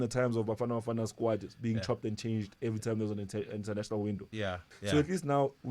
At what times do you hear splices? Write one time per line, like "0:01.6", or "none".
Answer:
0:04.7